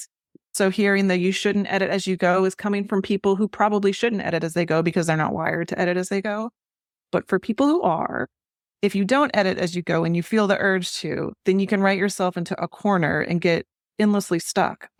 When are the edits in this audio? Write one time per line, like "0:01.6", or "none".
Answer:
none